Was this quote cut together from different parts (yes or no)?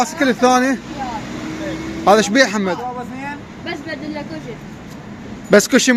no